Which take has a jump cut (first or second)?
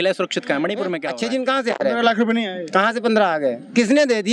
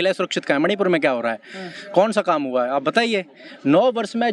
first